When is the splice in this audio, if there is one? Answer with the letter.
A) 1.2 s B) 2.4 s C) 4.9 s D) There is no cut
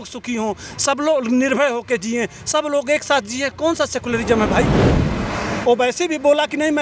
C